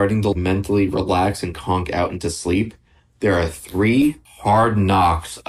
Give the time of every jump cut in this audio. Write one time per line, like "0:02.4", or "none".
none